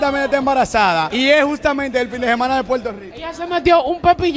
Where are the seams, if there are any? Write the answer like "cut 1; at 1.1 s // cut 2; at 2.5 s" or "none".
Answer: cut 1; at 3.1 s